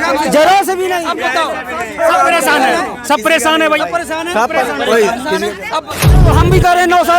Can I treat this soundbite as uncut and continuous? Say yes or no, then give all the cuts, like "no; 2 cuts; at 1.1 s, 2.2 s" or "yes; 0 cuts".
no; 1 cut; at 6.2 s